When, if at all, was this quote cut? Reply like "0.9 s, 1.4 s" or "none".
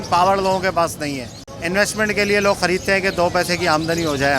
1.5 s